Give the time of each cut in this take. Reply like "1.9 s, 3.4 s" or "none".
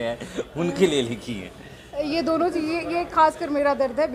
none